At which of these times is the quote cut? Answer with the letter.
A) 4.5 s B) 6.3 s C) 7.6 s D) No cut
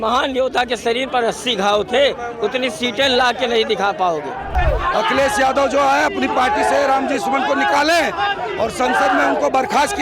A